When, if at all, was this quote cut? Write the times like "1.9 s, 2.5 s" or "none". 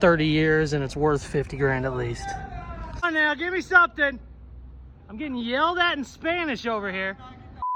none